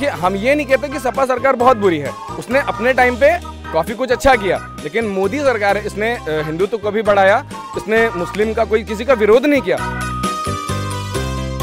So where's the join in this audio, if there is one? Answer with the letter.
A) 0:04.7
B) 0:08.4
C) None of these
C